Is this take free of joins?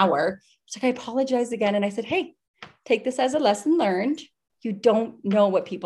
yes; 0 cuts

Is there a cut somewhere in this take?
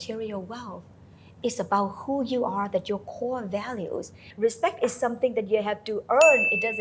yes; 1 cut; at 4.2 s

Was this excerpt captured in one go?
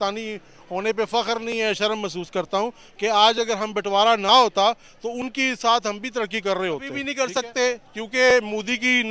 no; 1 cut; at 7.1 s

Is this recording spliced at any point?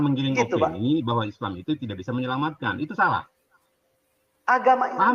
no; 0 cuts

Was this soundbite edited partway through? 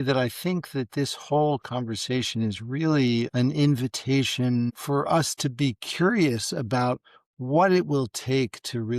yes; 1 cut; at 4.7 s

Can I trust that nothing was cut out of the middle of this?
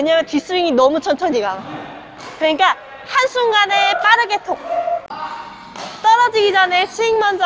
no; 1 cut; at 5.1 s

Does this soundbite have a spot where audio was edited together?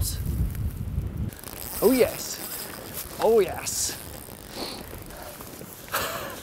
no; 0 cuts

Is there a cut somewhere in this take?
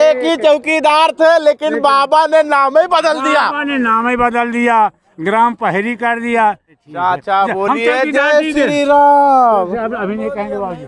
yes; 1 cut; at 6.8 s

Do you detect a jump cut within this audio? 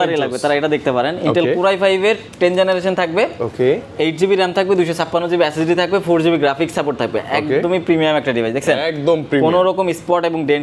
no; 0 cuts

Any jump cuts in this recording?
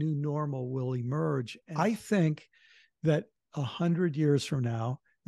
yes; 1 cut; at 1.6 s

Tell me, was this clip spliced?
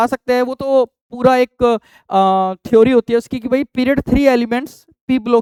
no; 0 cuts

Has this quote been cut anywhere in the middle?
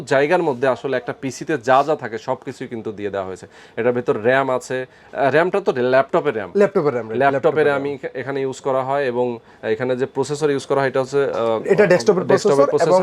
no; 0 cuts

